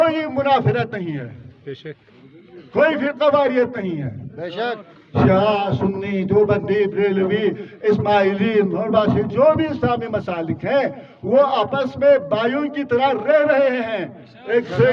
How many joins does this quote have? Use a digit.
0